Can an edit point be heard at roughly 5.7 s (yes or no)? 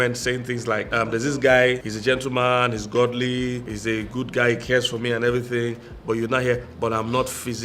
no